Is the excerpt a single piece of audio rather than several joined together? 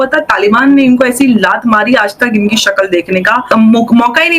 no; 1 cut; at 3.5 s

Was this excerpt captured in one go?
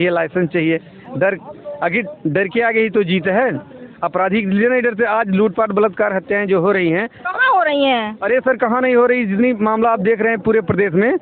yes; 0 cuts

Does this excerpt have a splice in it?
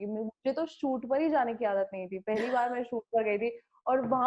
no; 0 cuts

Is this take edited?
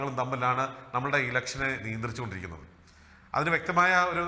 no; 0 cuts

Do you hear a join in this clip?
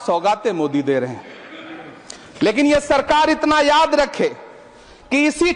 no; 0 cuts

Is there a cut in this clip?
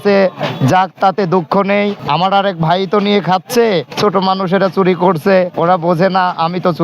yes; 3 cuts; at 2.0 s, 3.9 s, 5.5 s

